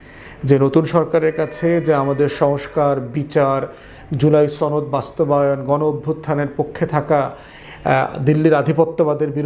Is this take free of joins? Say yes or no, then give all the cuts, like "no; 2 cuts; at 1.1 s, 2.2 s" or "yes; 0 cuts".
yes; 0 cuts